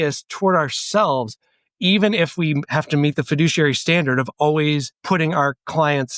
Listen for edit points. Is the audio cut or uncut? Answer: cut